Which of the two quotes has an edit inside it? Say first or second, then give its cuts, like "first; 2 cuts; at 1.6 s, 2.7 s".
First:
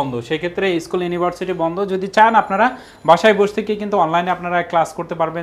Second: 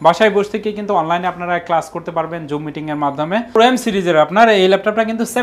second; 1 cut; at 3.5 s